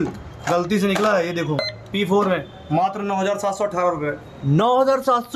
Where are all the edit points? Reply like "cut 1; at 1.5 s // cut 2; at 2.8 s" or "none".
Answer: cut 1; at 1.6 s